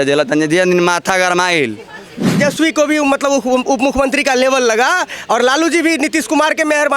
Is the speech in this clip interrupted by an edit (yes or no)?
yes